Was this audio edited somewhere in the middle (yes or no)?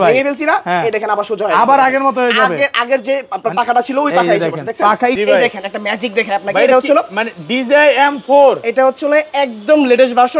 yes